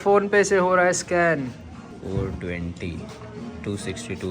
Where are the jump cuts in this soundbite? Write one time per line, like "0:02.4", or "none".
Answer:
0:01.9